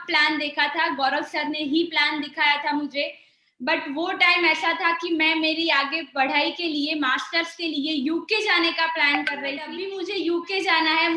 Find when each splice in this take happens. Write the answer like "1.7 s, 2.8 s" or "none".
9.8 s

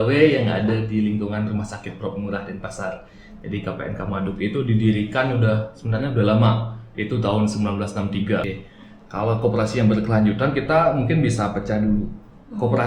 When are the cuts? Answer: 8.4 s

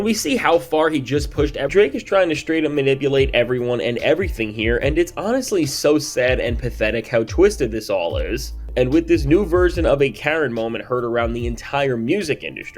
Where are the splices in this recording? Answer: 1.7 s

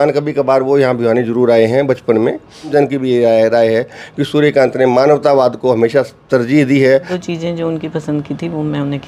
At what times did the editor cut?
2.7 s, 7.1 s

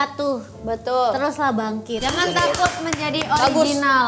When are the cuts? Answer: 1.9 s

